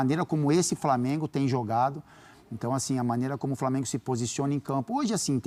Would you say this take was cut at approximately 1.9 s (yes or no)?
no